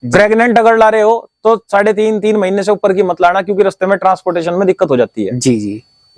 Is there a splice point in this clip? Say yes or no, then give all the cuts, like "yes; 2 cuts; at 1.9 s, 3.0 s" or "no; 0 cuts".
no; 0 cuts